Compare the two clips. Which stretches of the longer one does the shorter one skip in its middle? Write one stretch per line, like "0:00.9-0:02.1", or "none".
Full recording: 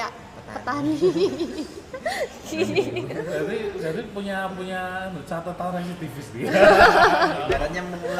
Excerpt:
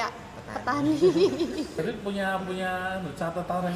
0:01.8-0:03.9

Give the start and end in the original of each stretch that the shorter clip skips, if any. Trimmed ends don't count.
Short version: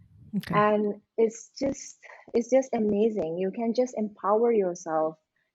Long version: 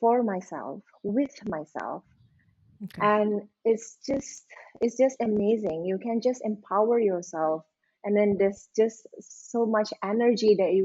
none

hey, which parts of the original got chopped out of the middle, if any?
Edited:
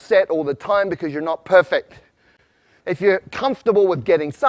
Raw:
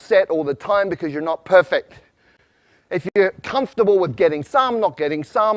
0:02.9-0:03.0

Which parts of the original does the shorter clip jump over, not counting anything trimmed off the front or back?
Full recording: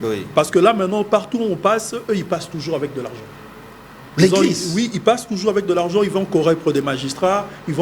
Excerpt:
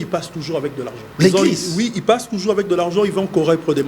0:03.2-0:04.0

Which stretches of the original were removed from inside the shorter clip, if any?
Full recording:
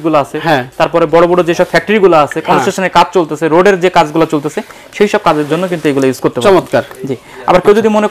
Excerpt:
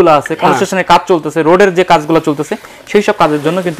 none

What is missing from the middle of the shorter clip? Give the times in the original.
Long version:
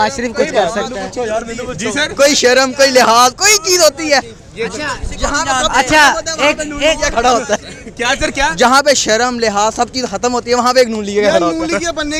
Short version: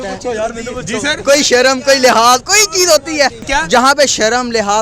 0:04.4-0:08.3

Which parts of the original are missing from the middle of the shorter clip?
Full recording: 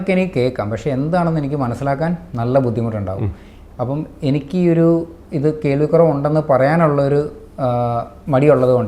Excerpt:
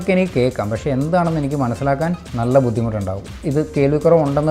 0:03.3-0:05.2

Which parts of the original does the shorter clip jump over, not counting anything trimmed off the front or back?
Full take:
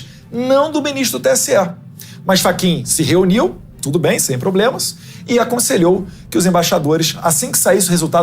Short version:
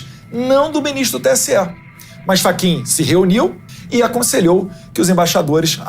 0:03.7-0:05.1

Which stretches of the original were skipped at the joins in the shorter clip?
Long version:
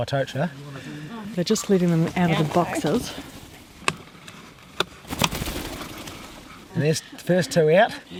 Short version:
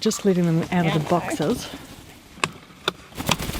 0:04.1-0:04.6

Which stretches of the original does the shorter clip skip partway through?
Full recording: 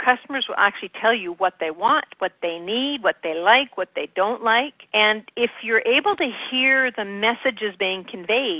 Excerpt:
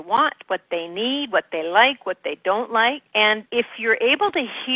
0:05.0-0:05.1

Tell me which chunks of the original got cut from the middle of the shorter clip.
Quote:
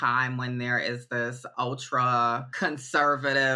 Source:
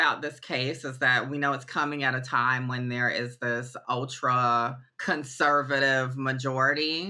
0:04.8-0:04.9

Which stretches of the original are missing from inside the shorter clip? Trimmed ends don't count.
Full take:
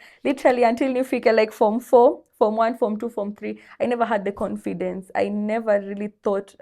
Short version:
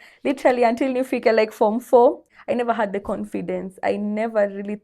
0:02.3-0:03.6

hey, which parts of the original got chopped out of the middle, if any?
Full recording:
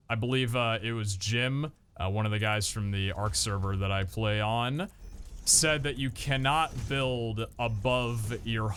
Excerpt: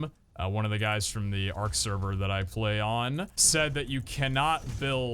0:05.0-0:05.5

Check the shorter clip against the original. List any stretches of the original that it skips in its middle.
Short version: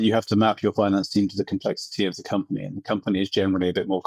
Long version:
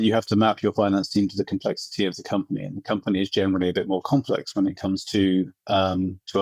none

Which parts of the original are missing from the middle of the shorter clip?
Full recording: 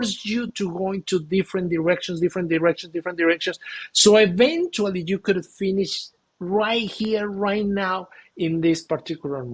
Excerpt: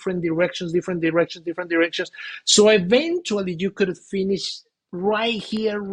none

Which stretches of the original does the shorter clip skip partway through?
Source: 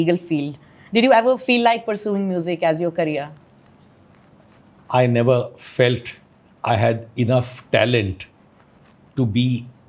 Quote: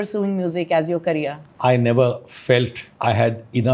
0:03.4-0:04.7
0:06.1-0:06.5

